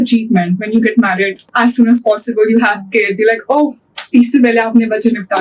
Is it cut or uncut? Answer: uncut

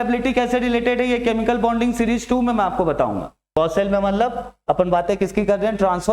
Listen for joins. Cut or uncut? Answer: cut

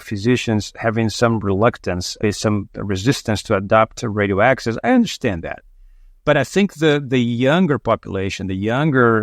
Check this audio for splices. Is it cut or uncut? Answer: uncut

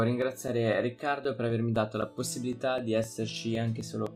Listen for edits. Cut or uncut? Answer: uncut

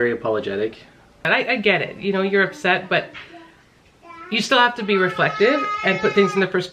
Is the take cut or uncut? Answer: cut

